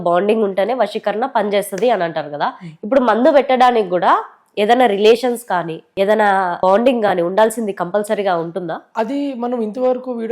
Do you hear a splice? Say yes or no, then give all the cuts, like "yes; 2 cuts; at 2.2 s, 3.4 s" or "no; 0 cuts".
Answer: yes; 2 cuts; at 6.6 s, 8.8 s